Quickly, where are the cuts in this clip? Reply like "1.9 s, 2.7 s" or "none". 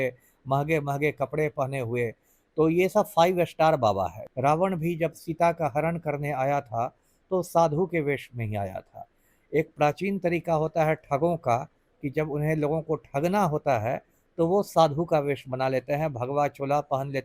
4.2 s